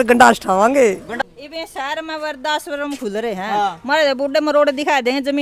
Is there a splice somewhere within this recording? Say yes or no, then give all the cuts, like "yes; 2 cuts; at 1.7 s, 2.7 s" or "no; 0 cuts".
yes; 1 cut; at 1.1 s